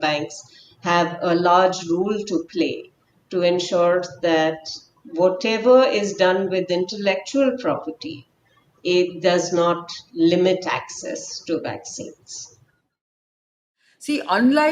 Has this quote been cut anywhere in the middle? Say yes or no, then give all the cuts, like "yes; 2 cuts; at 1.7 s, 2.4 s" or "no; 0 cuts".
yes; 1 cut; at 13.3 s